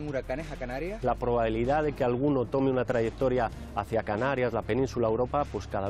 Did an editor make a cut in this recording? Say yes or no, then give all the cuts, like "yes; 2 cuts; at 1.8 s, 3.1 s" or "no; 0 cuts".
yes; 1 cut; at 1.0 s